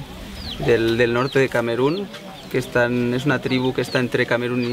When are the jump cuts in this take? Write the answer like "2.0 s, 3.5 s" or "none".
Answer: 2.7 s